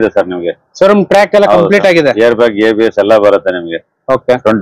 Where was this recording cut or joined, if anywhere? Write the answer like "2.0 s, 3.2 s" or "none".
none